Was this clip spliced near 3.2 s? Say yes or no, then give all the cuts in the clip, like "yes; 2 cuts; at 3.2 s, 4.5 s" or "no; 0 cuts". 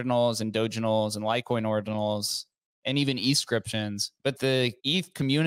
no; 1 cut; at 4.5 s